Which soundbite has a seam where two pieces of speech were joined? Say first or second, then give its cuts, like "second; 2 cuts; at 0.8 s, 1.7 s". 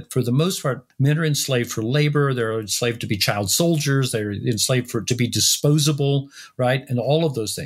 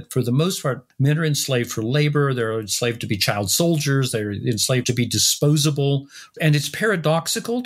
second; 2 cuts; at 4.8 s, 6.2 s